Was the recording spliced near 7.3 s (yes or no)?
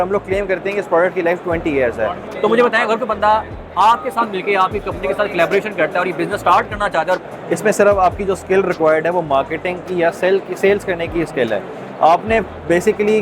yes